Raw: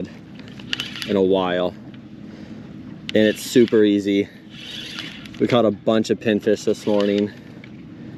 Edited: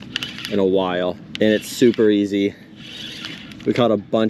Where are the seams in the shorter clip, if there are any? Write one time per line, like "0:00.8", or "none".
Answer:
0:01.2